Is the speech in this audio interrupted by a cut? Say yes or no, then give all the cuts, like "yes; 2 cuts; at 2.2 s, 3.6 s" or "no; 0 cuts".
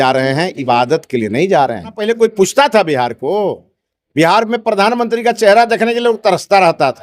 yes; 1 cut; at 2.0 s